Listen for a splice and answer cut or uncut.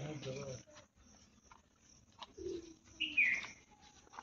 uncut